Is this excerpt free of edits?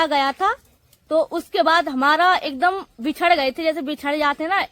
yes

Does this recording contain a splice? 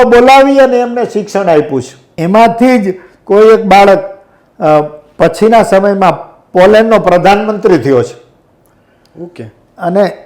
yes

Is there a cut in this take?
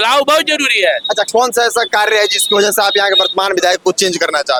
no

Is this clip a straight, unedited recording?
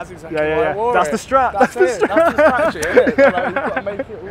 yes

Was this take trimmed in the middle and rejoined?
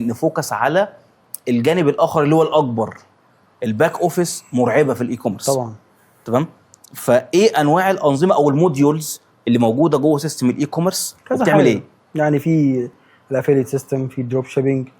no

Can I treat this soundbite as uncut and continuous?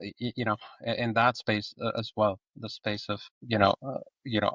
no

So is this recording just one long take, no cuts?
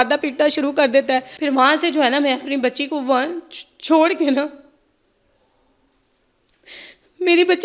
no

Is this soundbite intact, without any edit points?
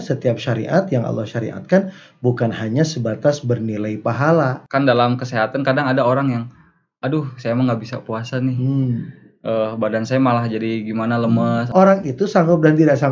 no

